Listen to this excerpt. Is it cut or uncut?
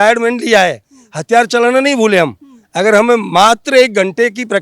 uncut